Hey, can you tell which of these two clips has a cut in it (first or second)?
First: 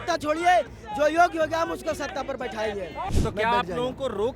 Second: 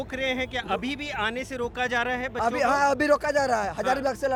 first